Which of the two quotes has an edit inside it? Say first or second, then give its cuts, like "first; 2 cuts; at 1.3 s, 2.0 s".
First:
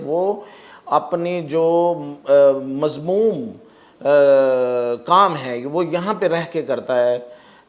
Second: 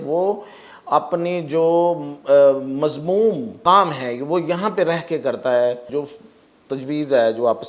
second; 2 cuts; at 3.5 s, 5.9 s